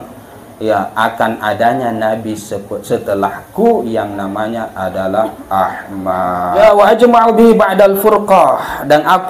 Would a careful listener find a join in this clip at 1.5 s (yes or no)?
no